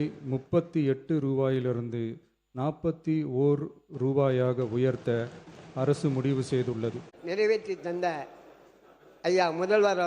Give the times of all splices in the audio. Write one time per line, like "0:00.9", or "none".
0:07.1